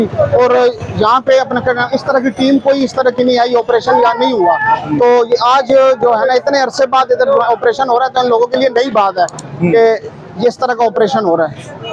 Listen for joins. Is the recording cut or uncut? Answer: uncut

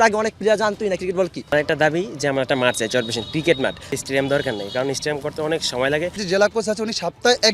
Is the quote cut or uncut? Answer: cut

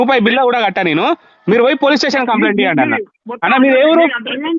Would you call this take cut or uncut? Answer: uncut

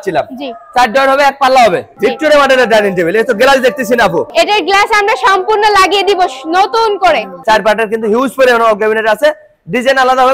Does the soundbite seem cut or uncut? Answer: cut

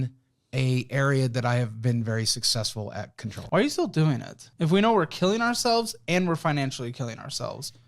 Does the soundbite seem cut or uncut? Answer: cut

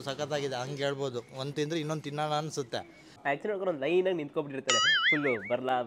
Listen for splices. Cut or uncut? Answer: cut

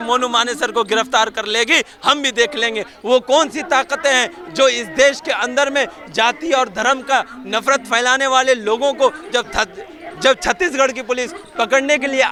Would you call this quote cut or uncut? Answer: uncut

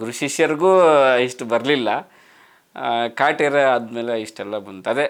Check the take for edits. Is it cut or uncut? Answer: uncut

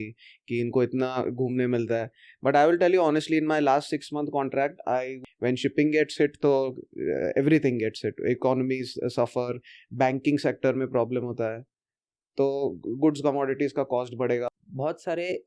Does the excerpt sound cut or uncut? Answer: cut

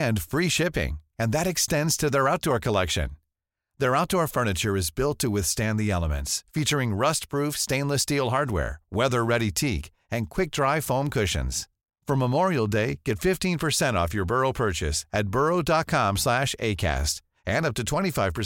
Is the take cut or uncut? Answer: uncut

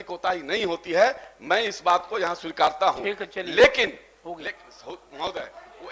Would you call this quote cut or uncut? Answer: uncut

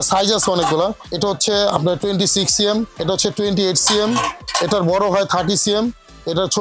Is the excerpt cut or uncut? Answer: cut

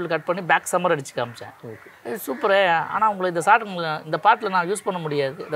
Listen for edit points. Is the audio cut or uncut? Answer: uncut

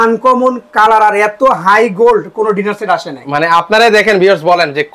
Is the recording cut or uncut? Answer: uncut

